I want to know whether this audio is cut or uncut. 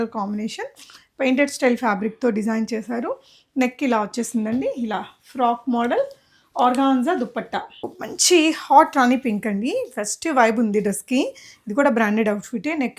cut